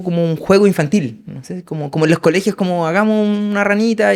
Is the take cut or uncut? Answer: uncut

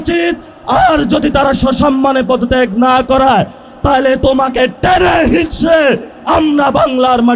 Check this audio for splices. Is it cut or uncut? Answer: uncut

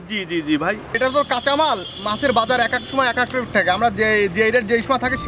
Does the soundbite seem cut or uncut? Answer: cut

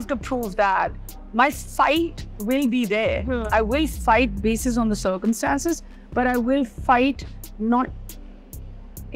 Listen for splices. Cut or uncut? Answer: uncut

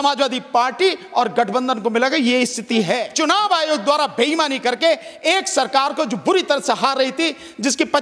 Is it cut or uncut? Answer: cut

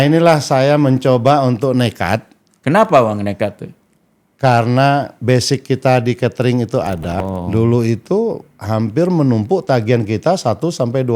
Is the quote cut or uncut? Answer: cut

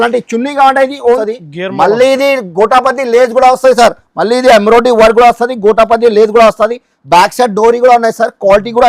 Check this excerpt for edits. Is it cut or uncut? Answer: cut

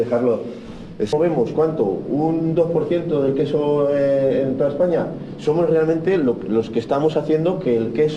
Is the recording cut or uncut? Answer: cut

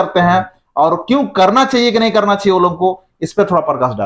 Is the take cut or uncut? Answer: uncut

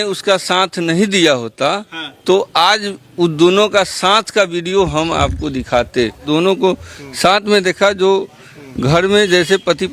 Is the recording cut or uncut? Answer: cut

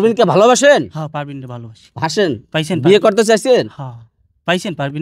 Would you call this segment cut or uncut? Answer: uncut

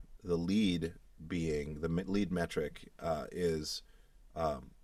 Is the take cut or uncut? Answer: uncut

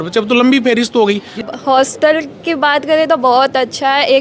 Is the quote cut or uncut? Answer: cut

